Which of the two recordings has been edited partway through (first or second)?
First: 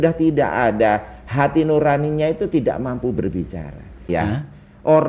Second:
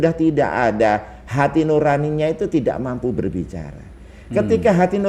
first